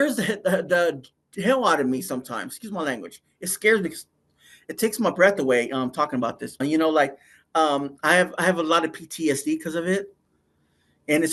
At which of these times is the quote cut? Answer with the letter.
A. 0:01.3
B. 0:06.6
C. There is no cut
B